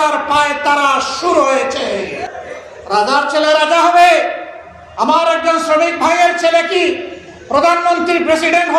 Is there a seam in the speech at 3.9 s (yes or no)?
no